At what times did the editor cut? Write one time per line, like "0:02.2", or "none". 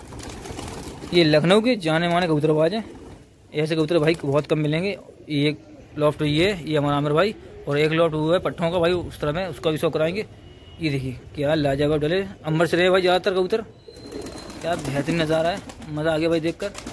none